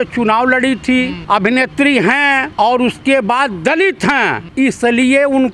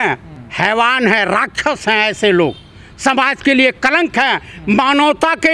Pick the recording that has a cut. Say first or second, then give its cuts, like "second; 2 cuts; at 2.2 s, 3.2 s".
first; 3 cuts; at 1.2 s, 2.5 s, 4.4 s